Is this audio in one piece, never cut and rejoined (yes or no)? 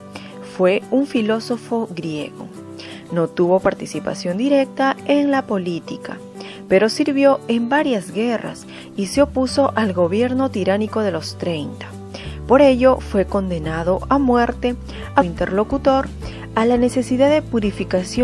yes